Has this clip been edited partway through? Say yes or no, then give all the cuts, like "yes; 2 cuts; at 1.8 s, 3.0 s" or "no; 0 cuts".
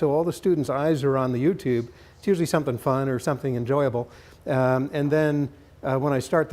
yes; 1 cut; at 1.3 s